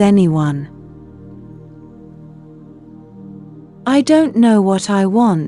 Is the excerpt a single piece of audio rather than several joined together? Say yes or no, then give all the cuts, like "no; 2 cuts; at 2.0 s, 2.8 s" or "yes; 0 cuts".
yes; 0 cuts